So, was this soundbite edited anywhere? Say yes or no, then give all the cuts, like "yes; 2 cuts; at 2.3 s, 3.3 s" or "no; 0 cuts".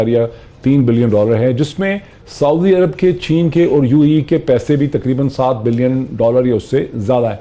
no; 0 cuts